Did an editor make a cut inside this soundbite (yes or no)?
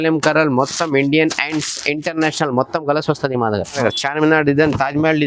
yes